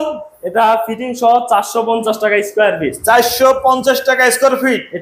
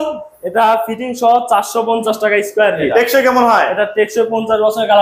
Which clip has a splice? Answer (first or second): second